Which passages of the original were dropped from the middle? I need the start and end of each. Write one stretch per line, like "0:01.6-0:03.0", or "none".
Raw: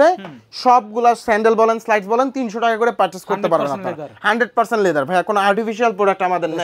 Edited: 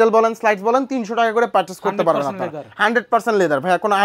none